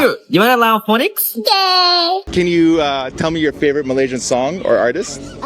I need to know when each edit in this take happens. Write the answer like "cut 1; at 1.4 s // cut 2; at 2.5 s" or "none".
cut 1; at 2.3 s